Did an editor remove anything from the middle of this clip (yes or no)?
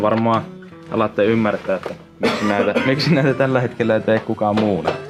no